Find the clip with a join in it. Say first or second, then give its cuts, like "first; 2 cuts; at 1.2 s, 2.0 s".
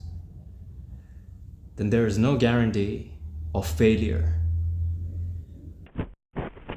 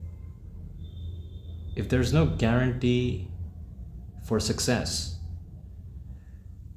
first; 1 cut; at 5.7 s